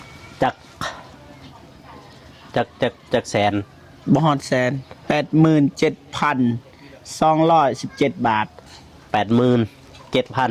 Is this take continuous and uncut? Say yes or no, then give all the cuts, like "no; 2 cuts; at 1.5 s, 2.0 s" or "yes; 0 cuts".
yes; 0 cuts